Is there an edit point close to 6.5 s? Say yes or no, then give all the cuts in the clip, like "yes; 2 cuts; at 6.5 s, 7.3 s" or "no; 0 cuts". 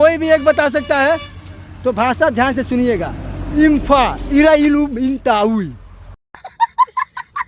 yes; 1 cut; at 6.5 s